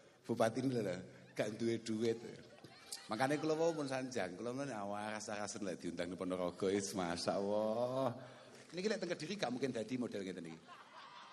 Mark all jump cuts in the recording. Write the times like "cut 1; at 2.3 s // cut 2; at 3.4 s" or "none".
cut 1; at 8.6 s